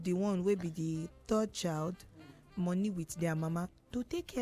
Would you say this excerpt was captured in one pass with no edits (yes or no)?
yes